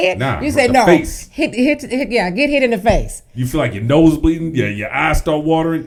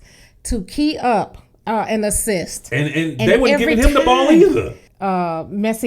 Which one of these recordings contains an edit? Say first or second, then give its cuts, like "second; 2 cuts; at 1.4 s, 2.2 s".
second; 1 cut; at 4.8 s